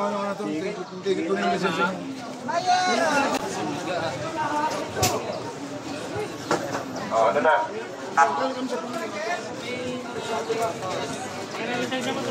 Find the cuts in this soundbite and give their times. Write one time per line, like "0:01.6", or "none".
0:03.4